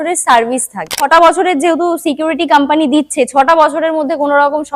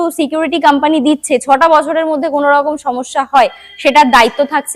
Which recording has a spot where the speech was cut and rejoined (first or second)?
first